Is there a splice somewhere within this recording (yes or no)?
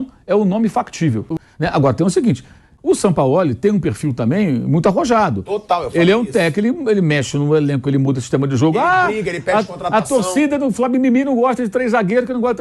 yes